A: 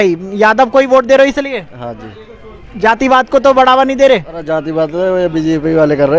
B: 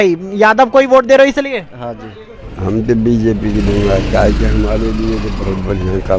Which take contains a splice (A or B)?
B